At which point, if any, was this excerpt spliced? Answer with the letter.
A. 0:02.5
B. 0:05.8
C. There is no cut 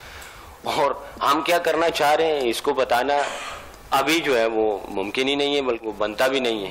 B